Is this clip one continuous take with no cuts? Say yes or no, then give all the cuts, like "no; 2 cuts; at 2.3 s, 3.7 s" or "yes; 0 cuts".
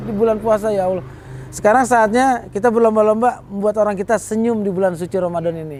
yes; 0 cuts